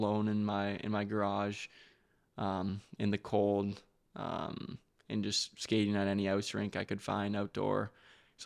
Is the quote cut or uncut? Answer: uncut